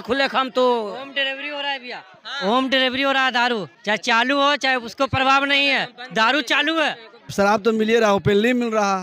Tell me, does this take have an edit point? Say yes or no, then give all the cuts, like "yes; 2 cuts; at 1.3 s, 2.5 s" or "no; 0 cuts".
yes; 2 cuts; at 3.7 s, 7.2 s